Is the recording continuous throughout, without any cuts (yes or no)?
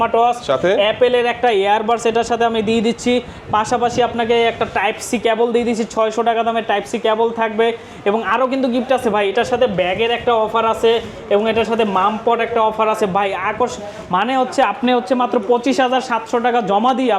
yes